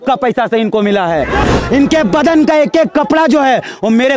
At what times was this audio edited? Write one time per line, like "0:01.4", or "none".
0:01.5

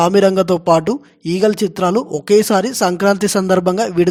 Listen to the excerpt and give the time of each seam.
none

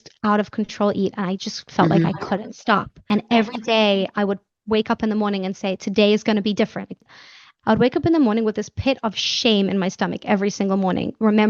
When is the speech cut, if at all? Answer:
0:03.1
0:07.2

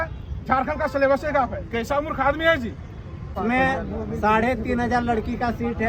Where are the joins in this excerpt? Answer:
0:03.2

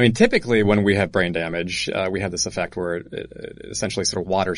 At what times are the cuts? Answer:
none

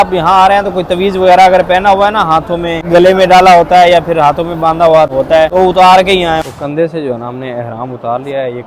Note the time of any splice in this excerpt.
0:02.8
0:05.2
0:06.4

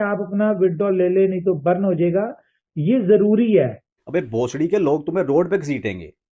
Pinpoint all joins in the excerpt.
0:03.9

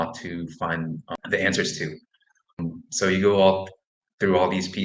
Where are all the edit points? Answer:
0:01.1
0:02.6

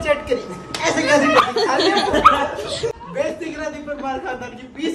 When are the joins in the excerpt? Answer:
0:02.9

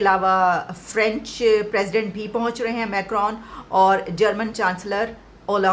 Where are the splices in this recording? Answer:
none

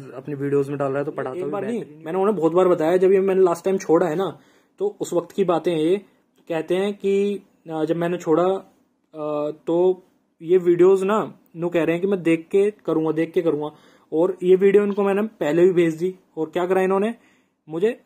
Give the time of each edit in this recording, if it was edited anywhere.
0:01.6

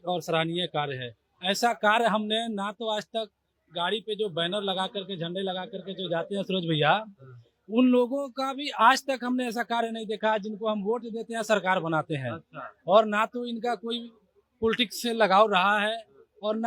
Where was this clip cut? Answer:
none

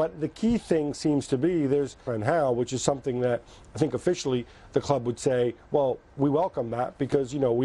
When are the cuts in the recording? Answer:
none

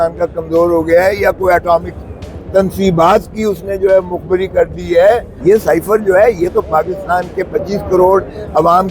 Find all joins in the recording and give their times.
0:05.3

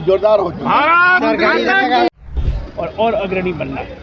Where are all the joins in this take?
0:02.4

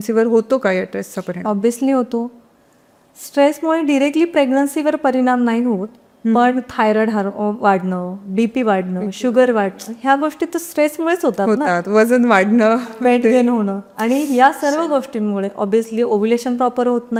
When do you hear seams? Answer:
none

